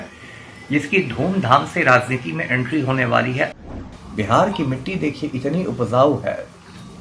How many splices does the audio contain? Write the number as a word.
one